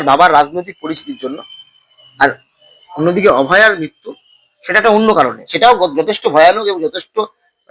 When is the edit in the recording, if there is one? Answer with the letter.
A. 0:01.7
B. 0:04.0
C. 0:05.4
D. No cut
D